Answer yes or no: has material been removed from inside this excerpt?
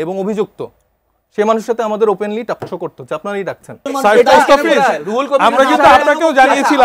yes